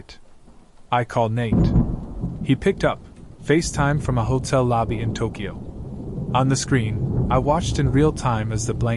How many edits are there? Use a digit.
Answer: 2